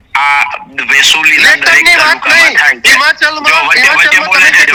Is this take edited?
no; 0 cuts

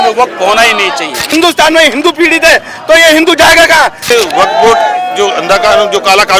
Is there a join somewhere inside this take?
yes; 2 cuts; at 1.3 s, 4.1 s

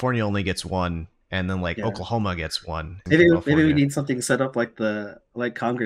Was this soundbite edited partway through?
yes; 1 cut; at 3.0 s

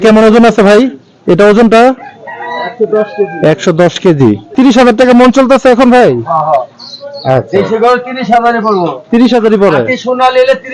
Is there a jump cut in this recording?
yes; 1 cut; at 4.5 s

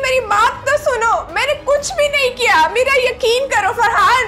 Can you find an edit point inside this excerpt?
no; 0 cuts

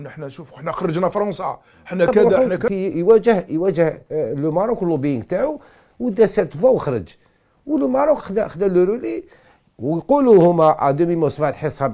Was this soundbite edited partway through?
yes; 1 cut; at 2.7 s

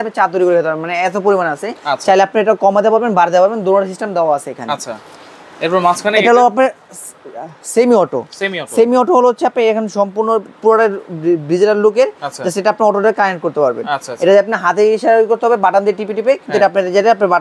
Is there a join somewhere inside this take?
no; 0 cuts

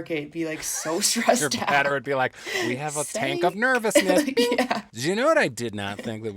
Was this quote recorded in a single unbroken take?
no; 1 cut; at 4.9 s

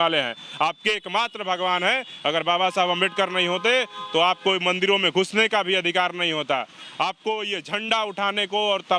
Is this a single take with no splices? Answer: yes; 0 cuts

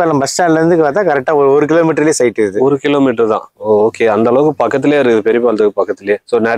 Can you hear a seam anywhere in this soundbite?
no; 0 cuts

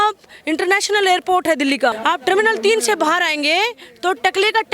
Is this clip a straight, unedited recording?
no; 1 cut; at 1.9 s

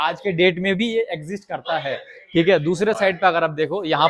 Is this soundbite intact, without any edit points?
yes; 0 cuts

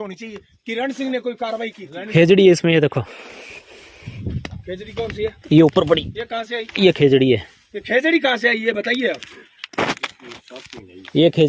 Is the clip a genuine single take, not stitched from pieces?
no; 1 cut; at 2.0 s

